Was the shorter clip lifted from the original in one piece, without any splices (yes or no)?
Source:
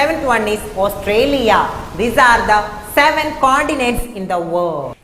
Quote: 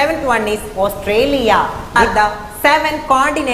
no